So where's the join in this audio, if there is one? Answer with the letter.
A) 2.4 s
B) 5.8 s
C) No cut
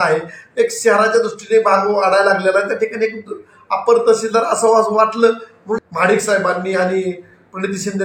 B